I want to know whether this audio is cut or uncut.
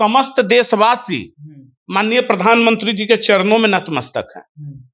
uncut